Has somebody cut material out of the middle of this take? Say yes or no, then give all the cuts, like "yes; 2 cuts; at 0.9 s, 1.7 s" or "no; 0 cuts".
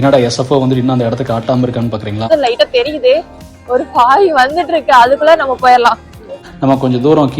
yes; 2 cuts; at 2.3 s, 6.4 s